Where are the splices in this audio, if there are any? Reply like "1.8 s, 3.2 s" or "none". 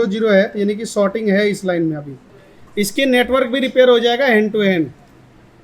2.2 s